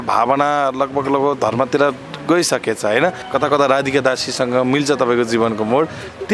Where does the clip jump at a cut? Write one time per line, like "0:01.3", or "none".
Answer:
0:03.2